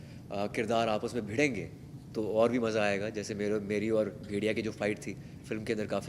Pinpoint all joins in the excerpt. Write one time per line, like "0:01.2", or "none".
none

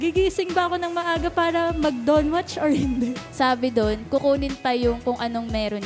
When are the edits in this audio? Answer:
0:03.2

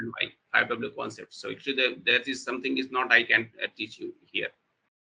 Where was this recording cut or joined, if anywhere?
none

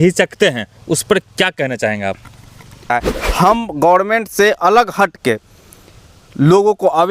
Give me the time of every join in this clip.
0:02.9

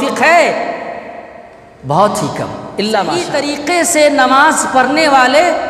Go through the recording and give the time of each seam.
0:03.3

